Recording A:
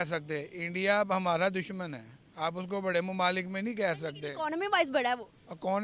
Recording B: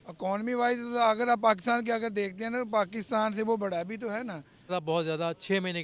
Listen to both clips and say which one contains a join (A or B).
B